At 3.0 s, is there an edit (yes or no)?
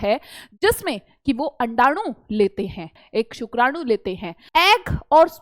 yes